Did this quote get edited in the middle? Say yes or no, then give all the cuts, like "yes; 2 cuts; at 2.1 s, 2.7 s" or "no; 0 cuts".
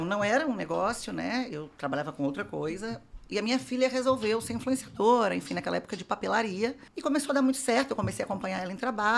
yes; 1 cut; at 6.9 s